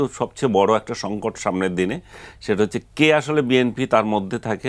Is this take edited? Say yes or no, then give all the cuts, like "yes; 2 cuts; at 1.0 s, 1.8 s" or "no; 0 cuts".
no; 0 cuts